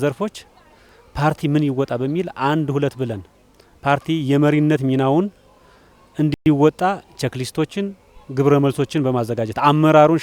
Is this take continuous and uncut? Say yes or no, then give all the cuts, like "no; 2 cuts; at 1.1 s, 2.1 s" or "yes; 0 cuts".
yes; 0 cuts